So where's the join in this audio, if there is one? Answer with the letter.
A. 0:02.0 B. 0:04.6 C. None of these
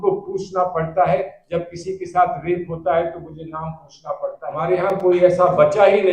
B